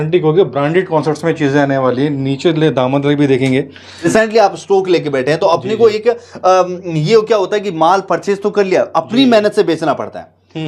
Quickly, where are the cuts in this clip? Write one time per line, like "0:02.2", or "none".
0:03.9

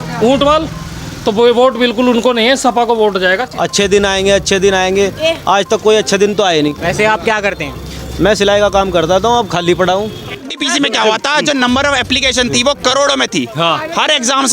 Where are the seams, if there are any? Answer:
0:03.5
0:06.8
0:10.6

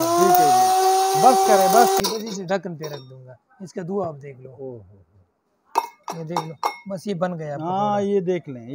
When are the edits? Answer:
0:02.0

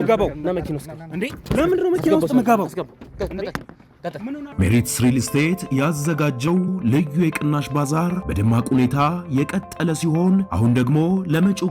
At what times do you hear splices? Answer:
0:04.5

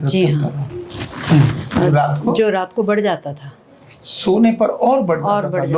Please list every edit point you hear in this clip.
none

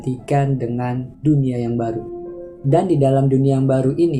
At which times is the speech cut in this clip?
none

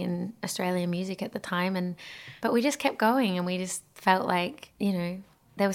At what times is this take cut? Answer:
none

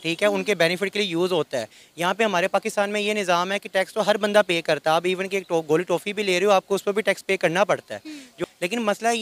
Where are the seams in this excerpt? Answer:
0:08.2

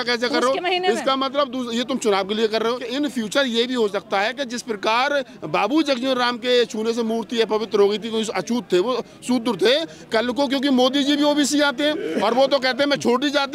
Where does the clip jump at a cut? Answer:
0:02.8

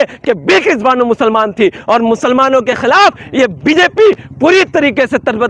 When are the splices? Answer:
none

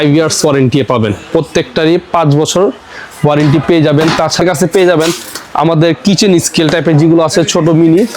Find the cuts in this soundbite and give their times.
0:04.4

